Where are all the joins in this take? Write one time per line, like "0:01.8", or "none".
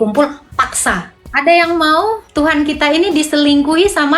0:01.2